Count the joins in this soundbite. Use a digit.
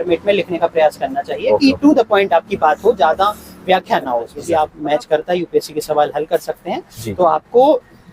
1